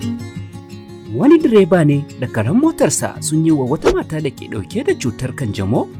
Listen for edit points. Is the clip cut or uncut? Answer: uncut